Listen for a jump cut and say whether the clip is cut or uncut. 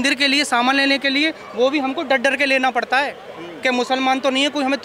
uncut